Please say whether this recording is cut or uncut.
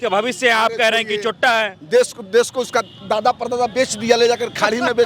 uncut